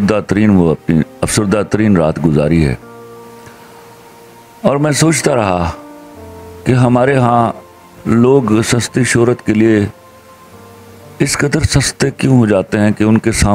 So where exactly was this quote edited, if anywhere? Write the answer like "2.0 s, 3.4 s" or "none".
none